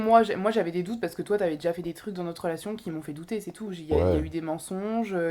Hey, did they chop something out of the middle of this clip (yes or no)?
no